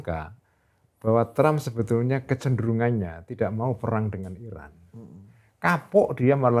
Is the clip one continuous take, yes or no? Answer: yes